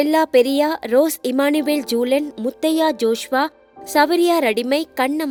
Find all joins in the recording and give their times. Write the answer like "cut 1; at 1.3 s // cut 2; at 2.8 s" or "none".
none